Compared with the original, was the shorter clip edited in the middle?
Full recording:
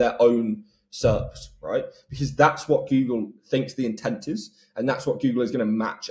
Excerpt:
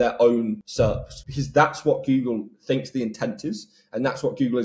yes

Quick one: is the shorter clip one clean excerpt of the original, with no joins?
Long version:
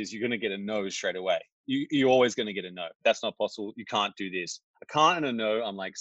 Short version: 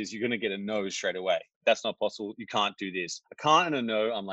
no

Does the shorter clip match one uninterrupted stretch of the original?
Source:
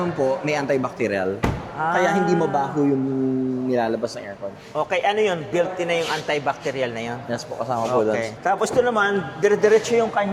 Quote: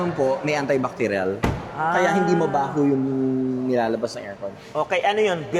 yes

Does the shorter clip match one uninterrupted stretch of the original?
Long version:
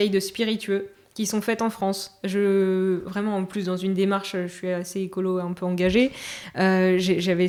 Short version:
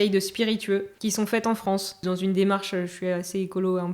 no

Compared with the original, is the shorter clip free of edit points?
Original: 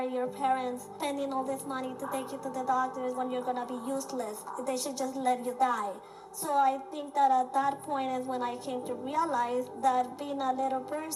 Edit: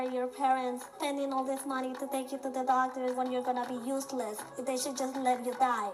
yes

